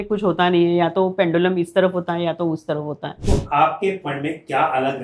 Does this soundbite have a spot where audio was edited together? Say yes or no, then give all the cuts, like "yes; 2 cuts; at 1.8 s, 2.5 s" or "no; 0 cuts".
yes; 1 cut; at 3.1 s